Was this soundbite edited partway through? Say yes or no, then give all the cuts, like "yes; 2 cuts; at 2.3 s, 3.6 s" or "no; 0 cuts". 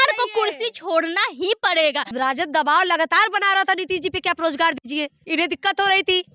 yes; 2 cuts; at 2.1 s, 5.2 s